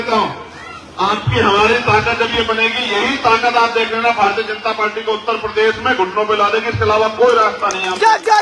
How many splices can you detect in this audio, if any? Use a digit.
0